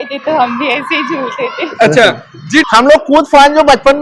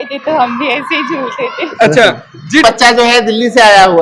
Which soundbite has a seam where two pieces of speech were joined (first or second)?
second